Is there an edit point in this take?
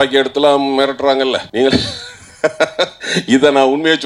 yes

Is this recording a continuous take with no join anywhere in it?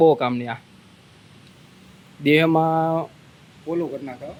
yes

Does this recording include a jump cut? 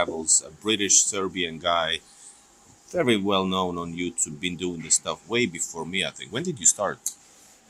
no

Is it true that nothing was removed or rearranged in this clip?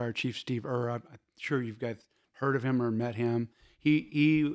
yes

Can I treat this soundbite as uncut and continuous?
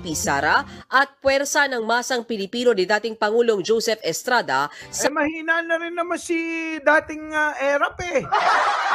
yes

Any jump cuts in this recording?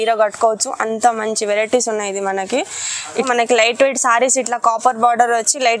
yes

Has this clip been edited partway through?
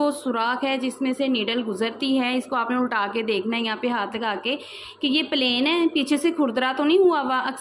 no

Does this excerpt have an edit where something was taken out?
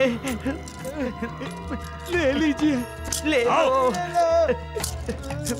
no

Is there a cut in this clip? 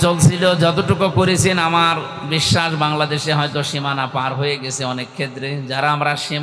no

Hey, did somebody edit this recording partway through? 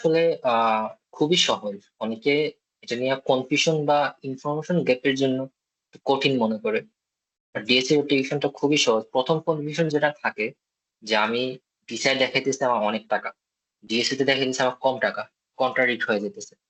no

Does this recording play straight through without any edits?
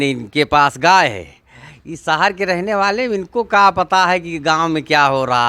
yes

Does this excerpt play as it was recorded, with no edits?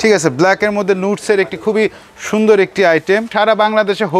no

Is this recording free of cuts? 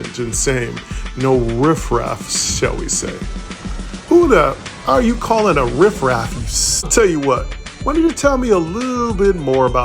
no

